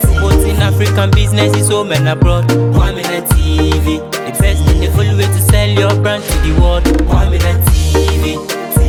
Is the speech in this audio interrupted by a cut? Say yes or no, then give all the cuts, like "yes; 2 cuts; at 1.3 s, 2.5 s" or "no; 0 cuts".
no; 0 cuts